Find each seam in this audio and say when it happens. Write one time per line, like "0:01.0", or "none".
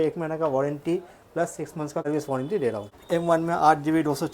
0:02.0
0:02.9